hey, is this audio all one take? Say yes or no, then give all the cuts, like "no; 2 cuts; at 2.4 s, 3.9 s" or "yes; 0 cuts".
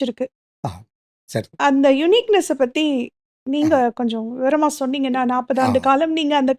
yes; 0 cuts